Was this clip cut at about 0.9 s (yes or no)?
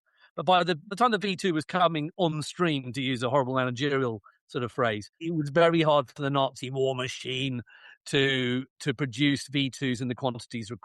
yes